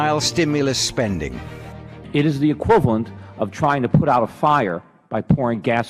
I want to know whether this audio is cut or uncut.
uncut